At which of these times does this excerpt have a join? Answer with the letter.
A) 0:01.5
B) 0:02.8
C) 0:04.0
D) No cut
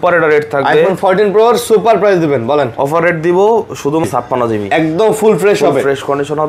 C